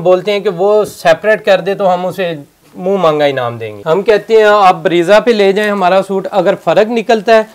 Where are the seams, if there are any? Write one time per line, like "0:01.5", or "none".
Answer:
0:03.7